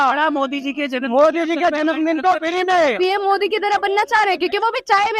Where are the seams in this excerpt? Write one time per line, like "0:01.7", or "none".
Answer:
0:02.9